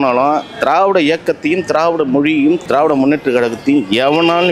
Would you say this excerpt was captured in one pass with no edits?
no; 1 cut; at 2.6 s

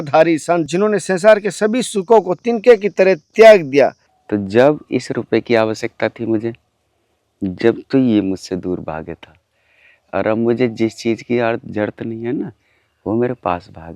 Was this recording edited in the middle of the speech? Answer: yes; 1 cut; at 4.0 s

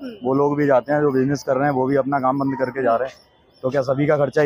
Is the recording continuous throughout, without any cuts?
yes; 0 cuts

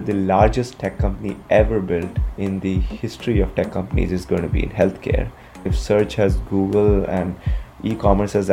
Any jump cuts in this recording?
yes; 1 cut; at 2.2 s

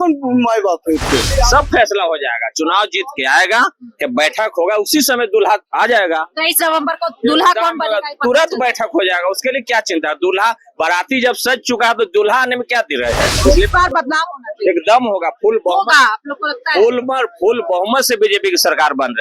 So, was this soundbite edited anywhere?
yes; 2 cuts; at 1.2 s, 13.3 s

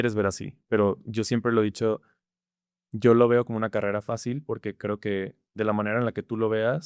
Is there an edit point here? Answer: no; 0 cuts

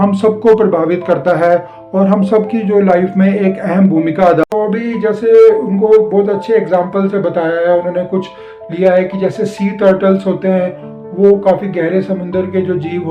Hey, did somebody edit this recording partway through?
yes; 1 cut; at 4.4 s

